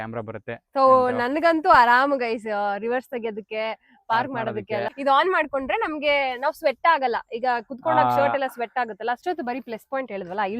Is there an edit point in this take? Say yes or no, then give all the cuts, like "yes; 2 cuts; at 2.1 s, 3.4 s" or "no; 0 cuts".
yes; 2 cuts; at 4.9 s, 9.2 s